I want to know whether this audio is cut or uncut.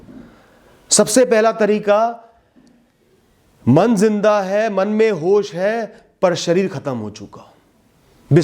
uncut